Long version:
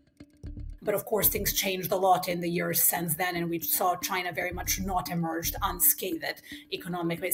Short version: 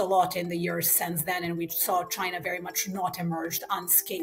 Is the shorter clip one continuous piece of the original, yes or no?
yes